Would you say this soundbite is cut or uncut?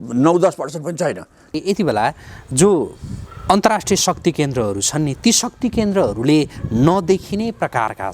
cut